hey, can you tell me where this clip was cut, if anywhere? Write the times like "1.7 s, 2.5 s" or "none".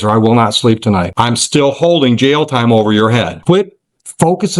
1.1 s, 3.4 s